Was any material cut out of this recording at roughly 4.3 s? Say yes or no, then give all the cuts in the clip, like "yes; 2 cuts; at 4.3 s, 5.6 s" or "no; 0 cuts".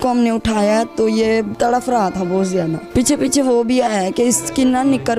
no; 2 cuts; at 1.5 s, 2.8 s